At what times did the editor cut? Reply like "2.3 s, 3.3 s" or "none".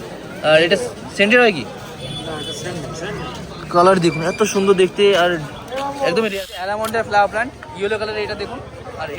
6.4 s